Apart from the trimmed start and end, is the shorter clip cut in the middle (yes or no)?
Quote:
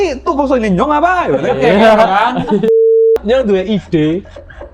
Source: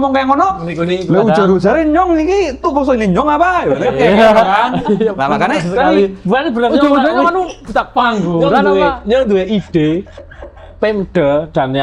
yes